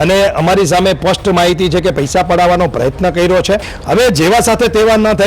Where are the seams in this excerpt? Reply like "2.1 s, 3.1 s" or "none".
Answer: 3.7 s